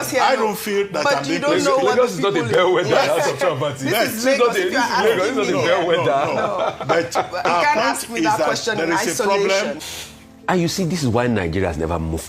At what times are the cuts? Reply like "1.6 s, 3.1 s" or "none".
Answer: 9.8 s